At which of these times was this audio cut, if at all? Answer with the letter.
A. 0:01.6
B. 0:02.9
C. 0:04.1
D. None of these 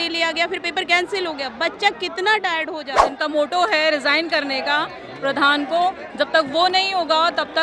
B